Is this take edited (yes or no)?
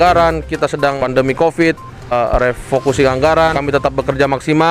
yes